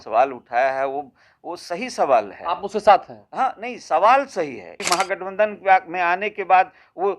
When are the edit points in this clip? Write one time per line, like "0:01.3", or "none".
0:04.8